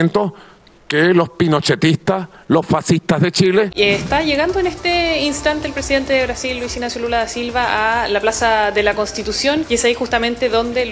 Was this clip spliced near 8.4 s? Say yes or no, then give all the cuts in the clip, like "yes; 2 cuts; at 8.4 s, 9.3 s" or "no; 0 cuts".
no; 2 cuts; at 3.7 s, 9.7 s